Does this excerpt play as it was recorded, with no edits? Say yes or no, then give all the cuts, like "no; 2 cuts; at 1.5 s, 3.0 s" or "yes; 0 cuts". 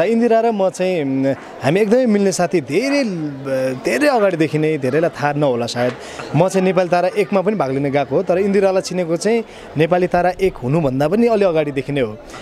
yes; 0 cuts